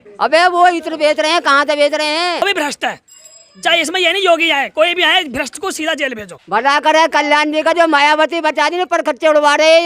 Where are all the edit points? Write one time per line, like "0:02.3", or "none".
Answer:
0:02.4
0:06.3